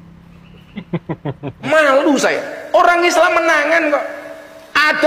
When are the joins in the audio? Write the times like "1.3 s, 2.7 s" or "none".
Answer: 1.7 s